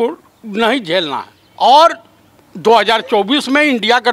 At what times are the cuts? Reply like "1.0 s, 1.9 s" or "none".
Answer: 1.4 s